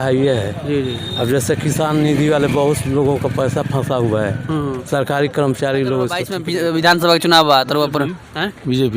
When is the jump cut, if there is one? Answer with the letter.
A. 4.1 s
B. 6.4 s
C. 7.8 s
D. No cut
B